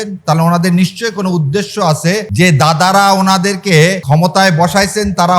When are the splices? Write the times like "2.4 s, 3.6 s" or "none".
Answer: 2.3 s, 4.0 s